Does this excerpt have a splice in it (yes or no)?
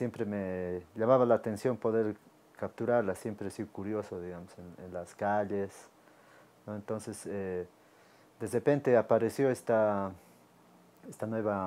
no